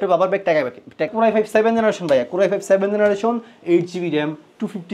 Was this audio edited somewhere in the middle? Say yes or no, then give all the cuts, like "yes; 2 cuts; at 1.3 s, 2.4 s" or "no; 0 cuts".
yes; 1 cut; at 1.1 s